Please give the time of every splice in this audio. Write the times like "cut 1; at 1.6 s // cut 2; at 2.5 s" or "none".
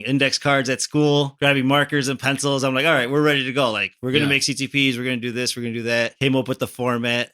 cut 1; at 1.3 s // cut 2; at 6.1 s